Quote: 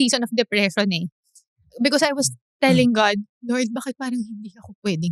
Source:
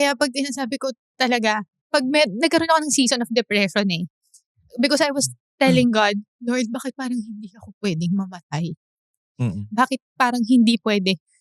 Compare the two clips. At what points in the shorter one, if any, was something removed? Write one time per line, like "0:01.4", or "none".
none

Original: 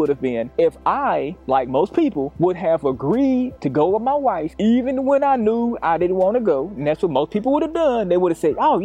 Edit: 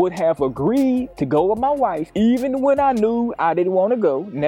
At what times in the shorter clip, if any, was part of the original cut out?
none

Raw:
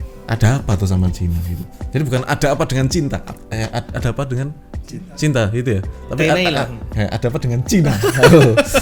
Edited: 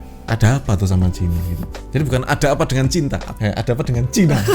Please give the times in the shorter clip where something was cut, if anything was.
0:03.3

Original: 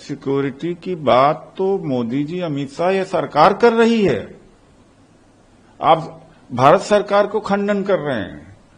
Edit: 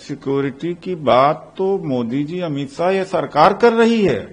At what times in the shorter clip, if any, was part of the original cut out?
none

